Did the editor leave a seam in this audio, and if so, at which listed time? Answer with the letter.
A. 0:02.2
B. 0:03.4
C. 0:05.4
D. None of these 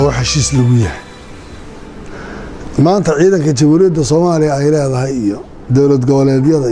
D